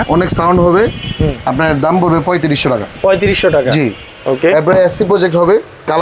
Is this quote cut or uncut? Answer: uncut